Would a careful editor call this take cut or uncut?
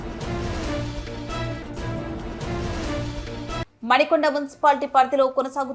cut